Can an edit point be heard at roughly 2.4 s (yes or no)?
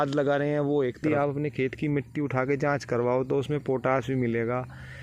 no